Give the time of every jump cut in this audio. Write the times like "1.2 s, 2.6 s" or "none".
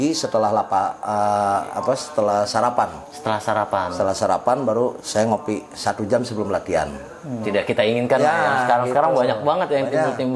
7.4 s